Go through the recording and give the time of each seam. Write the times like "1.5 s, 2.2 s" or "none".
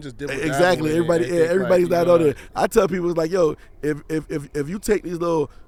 none